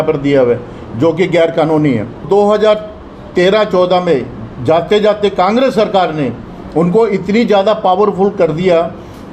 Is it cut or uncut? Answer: cut